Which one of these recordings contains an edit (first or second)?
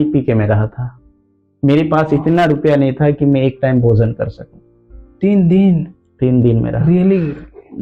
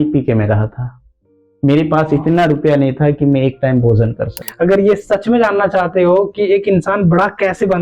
second